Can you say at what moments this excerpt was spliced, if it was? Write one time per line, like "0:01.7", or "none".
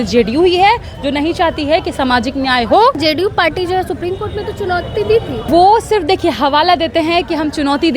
0:03.0
0:05.4